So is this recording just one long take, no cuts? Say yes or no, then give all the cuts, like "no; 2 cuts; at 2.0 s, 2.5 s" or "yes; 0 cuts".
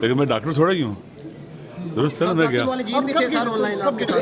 yes; 0 cuts